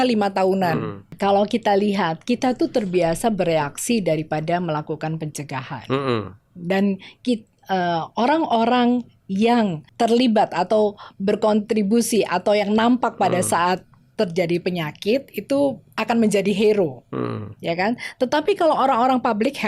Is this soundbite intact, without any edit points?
no; 2 cuts; at 1.1 s, 9.8 s

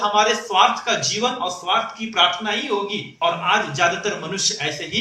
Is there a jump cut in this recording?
no; 0 cuts

